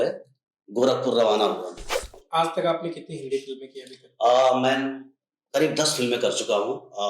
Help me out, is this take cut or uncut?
cut